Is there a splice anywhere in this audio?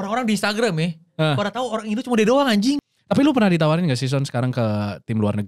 yes; 1 cut; at 2.8 s

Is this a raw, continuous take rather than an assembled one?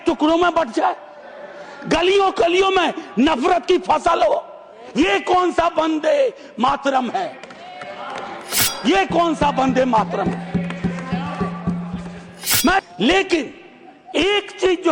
no; 1 cut; at 12.8 s

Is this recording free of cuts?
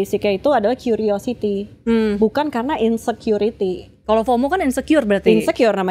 yes; 0 cuts

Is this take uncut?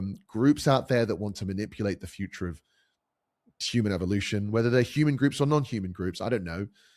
yes; 0 cuts

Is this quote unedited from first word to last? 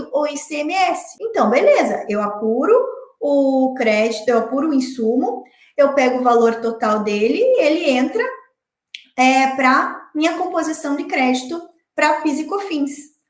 no; 1 cut; at 1.1 s

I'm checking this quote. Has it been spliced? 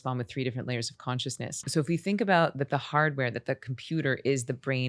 yes; 1 cut; at 1.6 s

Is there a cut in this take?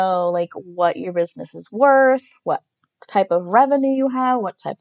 no; 0 cuts

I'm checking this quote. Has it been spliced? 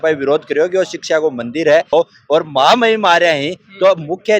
yes; 1 cut; at 1.9 s

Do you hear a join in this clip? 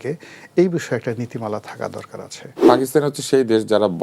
yes; 1 cut; at 2.6 s

